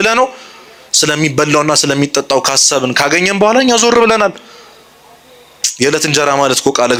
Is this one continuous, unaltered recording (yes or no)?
yes